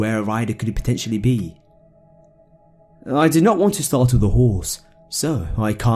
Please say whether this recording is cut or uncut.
cut